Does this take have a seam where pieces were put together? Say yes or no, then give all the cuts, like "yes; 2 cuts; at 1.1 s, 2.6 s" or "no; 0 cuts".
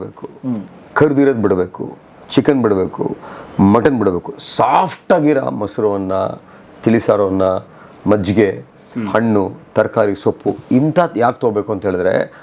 no; 0 cuts